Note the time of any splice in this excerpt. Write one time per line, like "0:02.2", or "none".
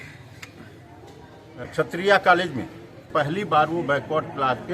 0:01.7
0:03.1